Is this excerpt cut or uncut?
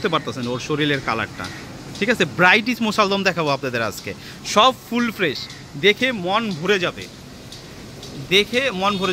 uncut